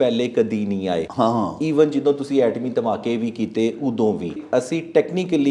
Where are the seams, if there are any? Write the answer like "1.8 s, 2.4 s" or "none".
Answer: 1.1 s, 4.4 s